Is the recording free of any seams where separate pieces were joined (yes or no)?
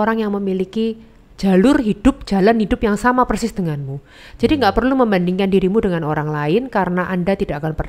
yes